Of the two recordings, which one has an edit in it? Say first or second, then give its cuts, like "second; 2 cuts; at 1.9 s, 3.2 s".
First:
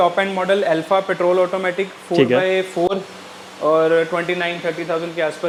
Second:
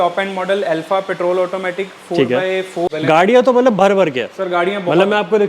second; 1 cut; at 3.0 s